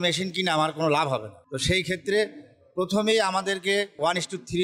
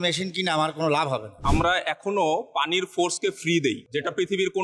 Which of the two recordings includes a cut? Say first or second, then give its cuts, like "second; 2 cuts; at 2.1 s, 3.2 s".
second; 1 cut; at 1.4 s